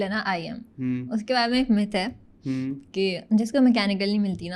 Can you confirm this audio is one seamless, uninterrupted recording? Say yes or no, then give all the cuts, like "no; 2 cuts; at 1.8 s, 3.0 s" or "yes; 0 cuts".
yes; 0 cuts